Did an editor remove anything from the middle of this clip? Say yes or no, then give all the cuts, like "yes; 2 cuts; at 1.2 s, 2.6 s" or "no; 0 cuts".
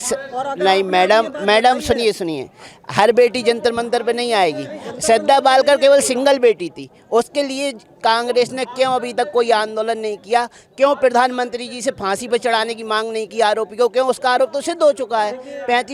no; 0 cuts